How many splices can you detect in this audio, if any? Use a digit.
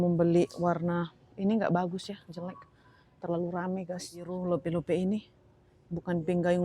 1